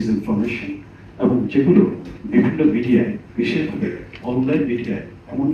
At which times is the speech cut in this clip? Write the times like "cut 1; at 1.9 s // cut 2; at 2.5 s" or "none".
none